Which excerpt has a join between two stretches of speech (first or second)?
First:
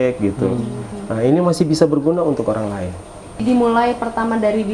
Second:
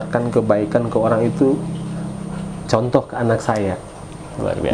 first